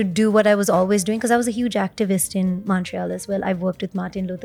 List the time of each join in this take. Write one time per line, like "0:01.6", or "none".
none